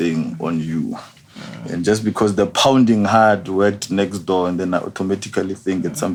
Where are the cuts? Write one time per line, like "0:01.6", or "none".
none